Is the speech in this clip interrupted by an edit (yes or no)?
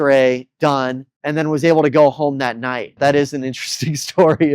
yes